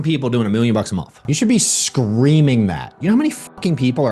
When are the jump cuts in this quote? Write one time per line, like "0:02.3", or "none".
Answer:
0:01.3
0:02.9